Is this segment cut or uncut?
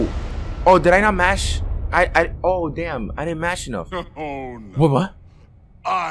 uncut